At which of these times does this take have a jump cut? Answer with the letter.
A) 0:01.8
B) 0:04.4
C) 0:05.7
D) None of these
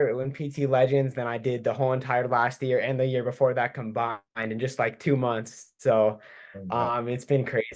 D